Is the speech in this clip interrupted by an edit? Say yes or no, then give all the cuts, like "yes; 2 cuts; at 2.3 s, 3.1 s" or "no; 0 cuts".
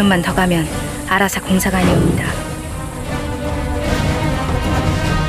no; 0 cuts